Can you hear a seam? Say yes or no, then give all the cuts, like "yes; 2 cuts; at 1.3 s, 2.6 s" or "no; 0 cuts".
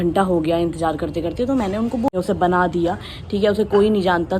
yes; 1 cut; at 2.1 s